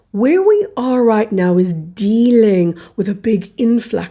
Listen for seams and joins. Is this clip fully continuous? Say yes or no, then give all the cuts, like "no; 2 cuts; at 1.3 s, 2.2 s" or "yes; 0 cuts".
yes; 0 cuts